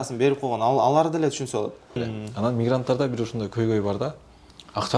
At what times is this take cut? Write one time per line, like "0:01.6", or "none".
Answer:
0:01.9